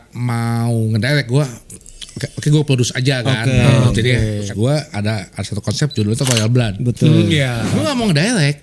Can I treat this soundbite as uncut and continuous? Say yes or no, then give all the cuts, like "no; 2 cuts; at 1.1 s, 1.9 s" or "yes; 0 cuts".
no; 2 cuts; at 4.4 s, 7.6 s